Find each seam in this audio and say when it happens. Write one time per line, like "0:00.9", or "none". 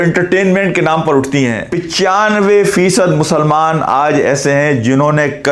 0:01.6